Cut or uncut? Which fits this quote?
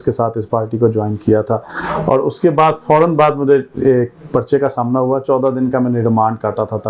uncut